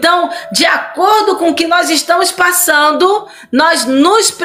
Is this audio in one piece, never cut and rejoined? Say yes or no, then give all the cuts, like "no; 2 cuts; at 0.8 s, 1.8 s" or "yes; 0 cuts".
yes; 0 cuts